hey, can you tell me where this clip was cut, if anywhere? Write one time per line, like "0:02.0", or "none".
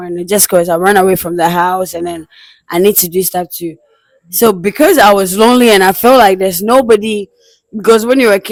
none